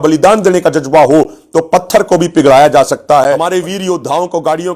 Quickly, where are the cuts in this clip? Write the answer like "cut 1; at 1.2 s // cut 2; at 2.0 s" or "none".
cut 1; at 3.4 s